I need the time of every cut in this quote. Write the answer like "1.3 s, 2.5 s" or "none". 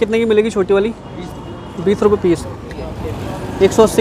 2.6 s